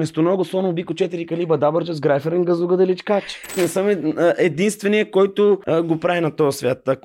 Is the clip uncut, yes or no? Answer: no